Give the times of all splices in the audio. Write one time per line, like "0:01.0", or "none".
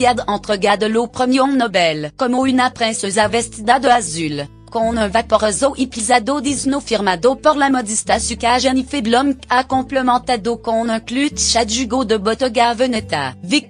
0:08.4